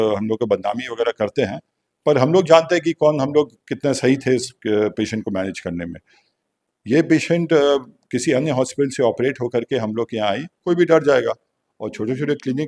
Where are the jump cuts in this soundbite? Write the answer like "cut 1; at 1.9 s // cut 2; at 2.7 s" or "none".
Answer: cut 1; at 10.6 s

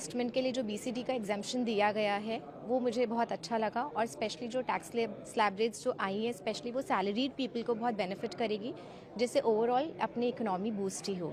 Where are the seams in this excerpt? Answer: none

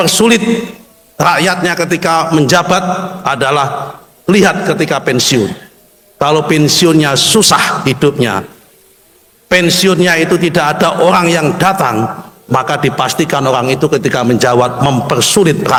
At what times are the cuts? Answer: none

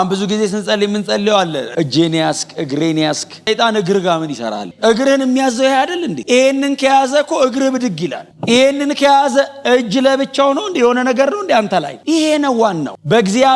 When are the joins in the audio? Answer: cut 1; at 1.7 s // cut 2; at 3.5 s // cut 3; at 11.9 s

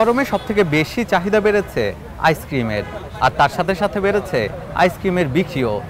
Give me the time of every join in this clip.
none

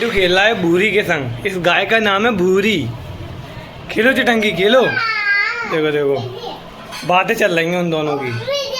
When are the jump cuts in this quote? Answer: none

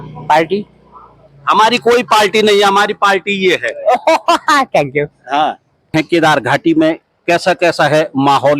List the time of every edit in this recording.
cut 1; at 5.9 s

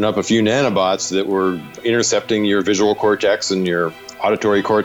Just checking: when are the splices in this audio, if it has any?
cut 1; at 1.8 s

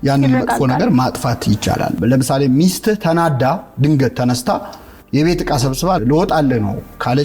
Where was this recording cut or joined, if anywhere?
cut 1; at 2.0 s // cut 2; at 6.0 s

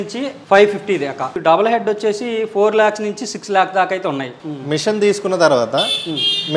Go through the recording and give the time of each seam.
cut 1; at 1.3 s // cut 2; at 4.4 s

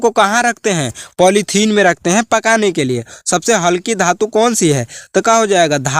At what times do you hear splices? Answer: none

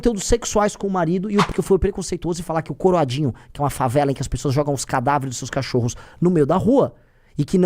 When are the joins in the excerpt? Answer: cut 1; at 1.5 s

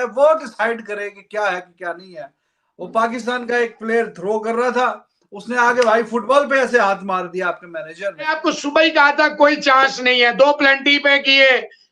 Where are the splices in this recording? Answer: cut 1; at 8.3 s

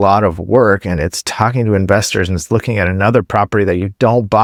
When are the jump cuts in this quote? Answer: none

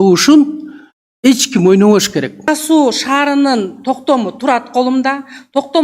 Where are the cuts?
cut 1; at 2.5 s

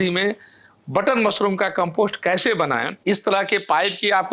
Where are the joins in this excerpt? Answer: cut 1; at 2.9 s

